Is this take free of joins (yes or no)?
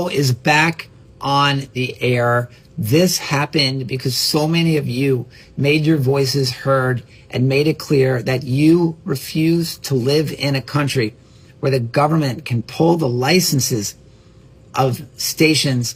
yes